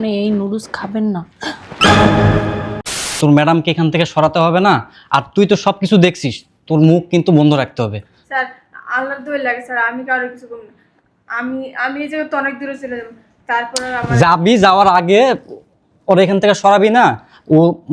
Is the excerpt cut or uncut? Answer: cut